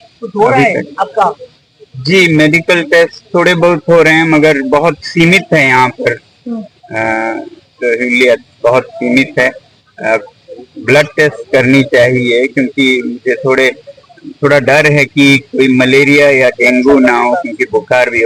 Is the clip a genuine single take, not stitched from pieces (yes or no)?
yes